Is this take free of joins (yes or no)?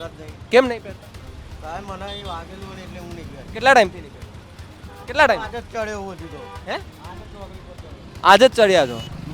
yes